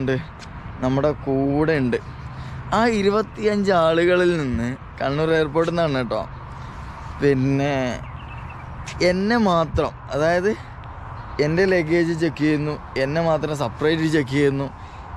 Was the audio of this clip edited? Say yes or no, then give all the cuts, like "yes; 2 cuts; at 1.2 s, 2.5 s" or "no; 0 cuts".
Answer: no; 0 cuts